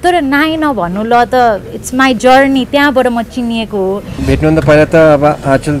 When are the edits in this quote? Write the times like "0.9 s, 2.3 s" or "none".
4.2 s